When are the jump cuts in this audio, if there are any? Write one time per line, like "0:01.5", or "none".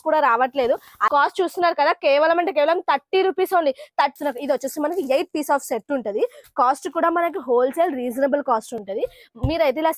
0:00.9
0:04.1